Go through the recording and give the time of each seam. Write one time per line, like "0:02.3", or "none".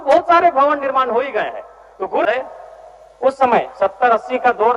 0:02.3